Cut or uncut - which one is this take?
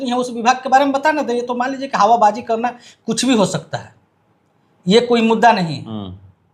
uncut